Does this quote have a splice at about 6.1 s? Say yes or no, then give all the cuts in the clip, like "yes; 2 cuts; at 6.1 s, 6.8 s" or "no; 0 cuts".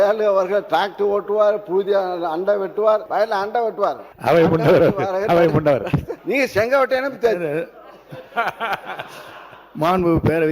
yes; 3 cuts; at 3.1 s, 4.1 s, 6.1 s